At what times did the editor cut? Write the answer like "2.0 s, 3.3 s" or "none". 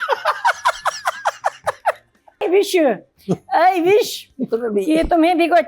2.4 s